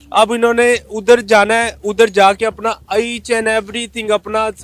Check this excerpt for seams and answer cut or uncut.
uncut